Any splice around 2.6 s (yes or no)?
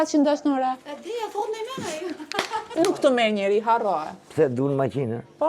yes